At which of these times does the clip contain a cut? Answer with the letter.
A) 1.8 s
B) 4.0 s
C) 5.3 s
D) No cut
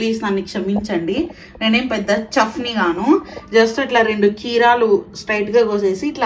D